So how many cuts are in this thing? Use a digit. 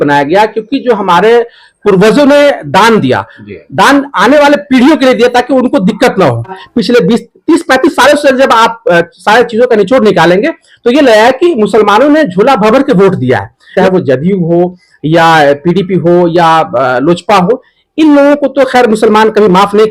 2